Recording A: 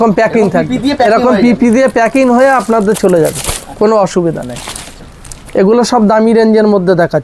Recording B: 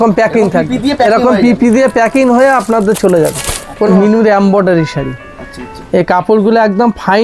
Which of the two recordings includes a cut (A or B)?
B